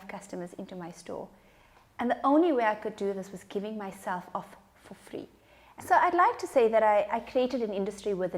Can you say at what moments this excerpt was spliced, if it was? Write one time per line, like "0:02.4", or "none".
0:05.8